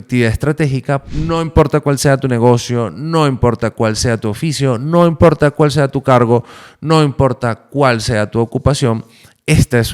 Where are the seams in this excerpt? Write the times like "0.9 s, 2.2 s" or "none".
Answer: 1.0 s